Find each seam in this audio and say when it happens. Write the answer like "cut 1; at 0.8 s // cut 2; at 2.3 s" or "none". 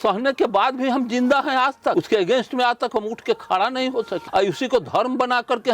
cut 1; at 1.9 s // cut 2; at 4.2 s